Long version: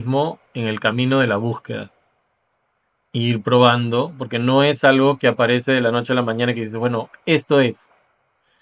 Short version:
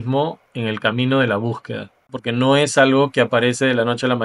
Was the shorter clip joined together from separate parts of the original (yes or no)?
yes